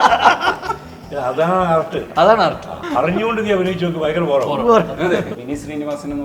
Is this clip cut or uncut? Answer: cut